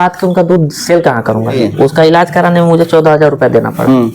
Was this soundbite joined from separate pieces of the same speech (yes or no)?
yes